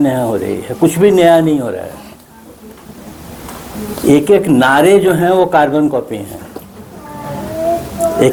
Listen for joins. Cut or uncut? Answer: uncut